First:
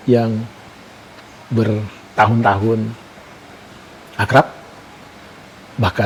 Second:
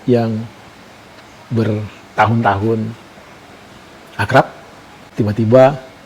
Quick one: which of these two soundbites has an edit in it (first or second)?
second